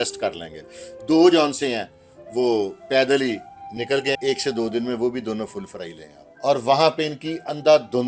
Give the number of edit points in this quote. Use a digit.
2